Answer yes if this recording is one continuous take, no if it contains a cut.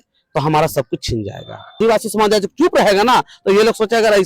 no